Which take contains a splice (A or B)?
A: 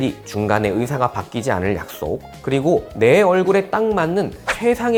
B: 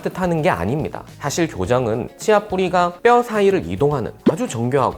B